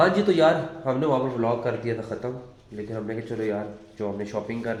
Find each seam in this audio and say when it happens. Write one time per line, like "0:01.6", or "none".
none